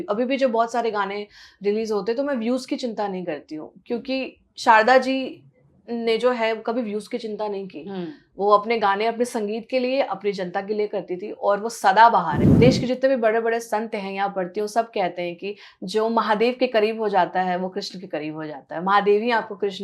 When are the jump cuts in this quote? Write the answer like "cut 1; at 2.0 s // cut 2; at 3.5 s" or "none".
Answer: cut 1; at 12.4 s